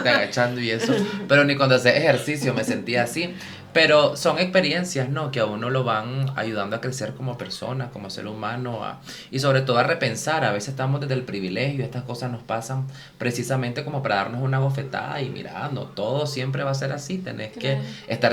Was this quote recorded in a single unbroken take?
yes; 0 cuts

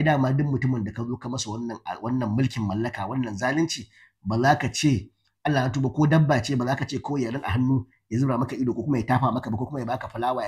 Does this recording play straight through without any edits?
yes; 0 cuts

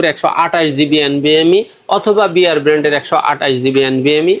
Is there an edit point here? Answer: no; 0 cuts

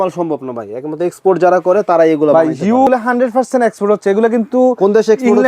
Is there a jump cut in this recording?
yes; 1 cut; at 2.9 s

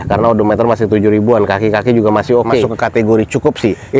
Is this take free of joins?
no; 1 cut; at 2.7 s

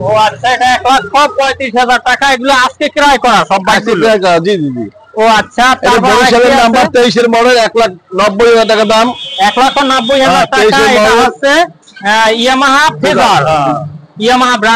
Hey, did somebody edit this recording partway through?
no; 0 cuts

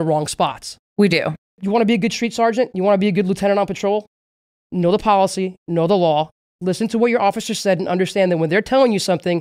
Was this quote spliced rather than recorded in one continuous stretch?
yes; 1 cut; at 1.6 s

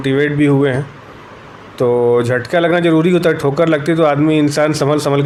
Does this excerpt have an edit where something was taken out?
no; 0 cuts

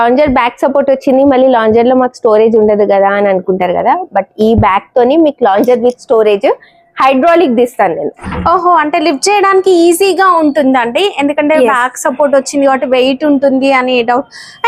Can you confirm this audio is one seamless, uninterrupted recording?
yes; 0 cuts

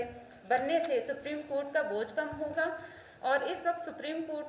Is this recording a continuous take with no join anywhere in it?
yes; 0 cuts

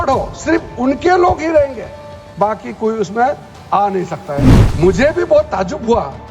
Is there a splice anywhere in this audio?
yes; 1 cut; at 4.6 s

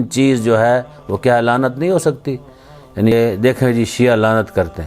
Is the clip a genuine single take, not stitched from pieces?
no; 1 cut; at 3.1 s

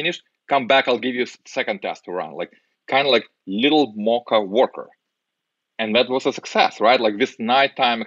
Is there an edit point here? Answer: no; 0 cuts

